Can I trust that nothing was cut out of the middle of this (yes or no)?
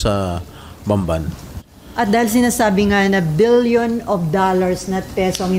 no